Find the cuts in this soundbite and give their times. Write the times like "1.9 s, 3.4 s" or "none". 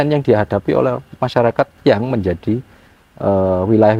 none